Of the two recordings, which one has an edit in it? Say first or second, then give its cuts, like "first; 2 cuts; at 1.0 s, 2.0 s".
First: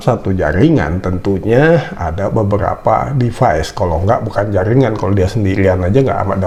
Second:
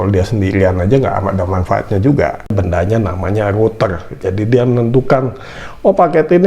second; 1 cut; at 2.4 s